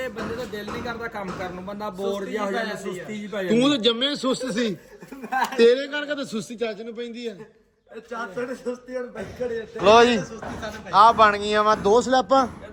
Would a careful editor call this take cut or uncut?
uncut